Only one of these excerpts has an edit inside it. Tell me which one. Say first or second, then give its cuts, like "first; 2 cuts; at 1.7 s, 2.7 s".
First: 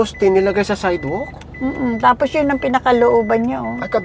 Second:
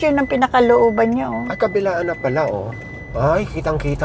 second; 1 cut; at 3.0 s